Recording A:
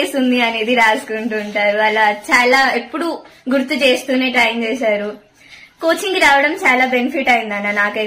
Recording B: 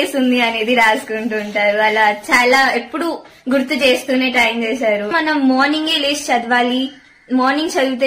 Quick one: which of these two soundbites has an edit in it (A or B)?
B